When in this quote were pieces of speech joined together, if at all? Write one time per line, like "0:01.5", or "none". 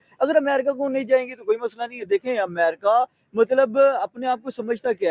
none